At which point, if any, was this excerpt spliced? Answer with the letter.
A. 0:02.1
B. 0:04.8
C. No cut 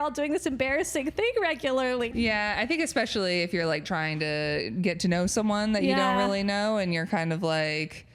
A